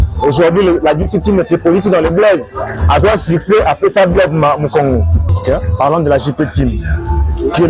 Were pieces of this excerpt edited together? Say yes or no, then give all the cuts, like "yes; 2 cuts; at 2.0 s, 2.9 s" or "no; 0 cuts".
yes; 1 cut; at 5.2 s